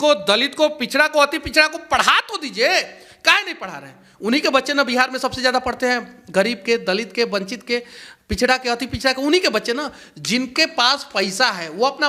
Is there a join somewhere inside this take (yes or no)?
no